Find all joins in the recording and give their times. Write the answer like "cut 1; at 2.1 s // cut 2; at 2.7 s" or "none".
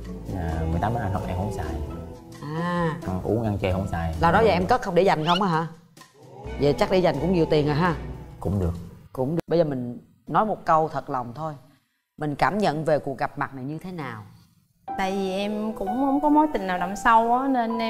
cut 1; at 9.4 s

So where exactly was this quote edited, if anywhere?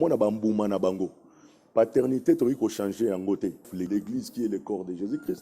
cut 1; at 3.8 s

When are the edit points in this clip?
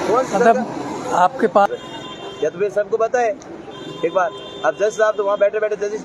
cut 1; at 1.7 s

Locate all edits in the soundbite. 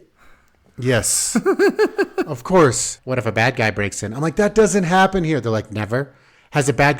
cut 1; at 2.9 s

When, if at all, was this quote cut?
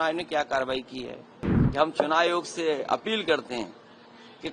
cut 1; at 1.5 s

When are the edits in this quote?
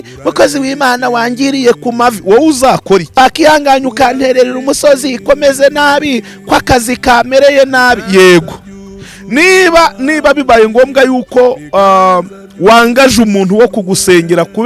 cut 1; at 3.2 s

